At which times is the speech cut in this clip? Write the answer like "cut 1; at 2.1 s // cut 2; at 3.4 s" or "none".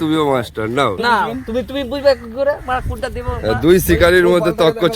cut 1; at 1.0 s

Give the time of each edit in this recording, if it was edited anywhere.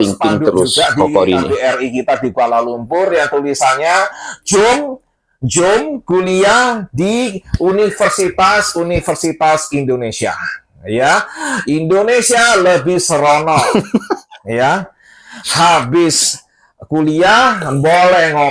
none

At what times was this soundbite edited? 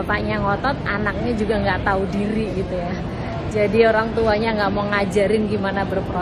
none

